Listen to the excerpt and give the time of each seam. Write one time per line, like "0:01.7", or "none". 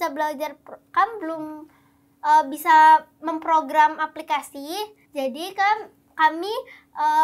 0:05.0